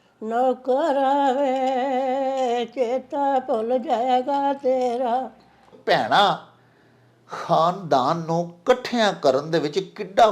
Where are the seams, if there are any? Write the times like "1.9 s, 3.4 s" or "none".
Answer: 5.7 s